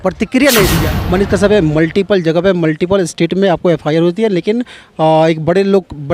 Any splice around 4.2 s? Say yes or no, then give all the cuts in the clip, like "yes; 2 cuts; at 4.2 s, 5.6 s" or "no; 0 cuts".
no; 1 cut; at 0.9 s